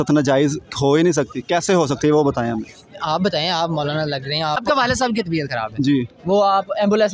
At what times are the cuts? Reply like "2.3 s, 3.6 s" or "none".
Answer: 4.8 s